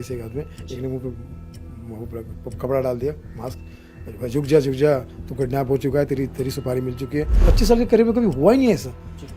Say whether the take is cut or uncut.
cut